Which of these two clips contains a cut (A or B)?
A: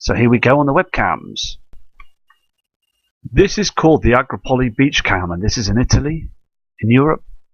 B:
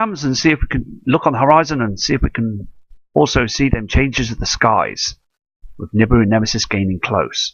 A